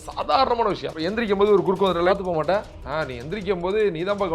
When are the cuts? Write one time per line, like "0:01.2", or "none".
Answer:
0:00.9
0:02.1
0:02.8